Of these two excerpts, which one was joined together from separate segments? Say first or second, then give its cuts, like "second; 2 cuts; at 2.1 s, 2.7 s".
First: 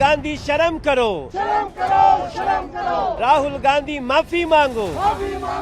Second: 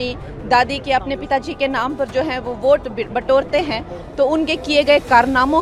first; 1 cut; at 3.2 s